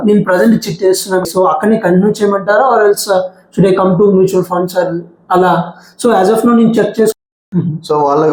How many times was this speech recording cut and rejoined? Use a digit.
2